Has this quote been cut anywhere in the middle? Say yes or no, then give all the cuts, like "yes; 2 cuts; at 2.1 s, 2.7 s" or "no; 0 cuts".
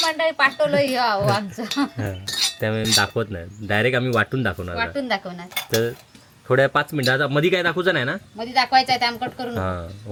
no; 0 cuts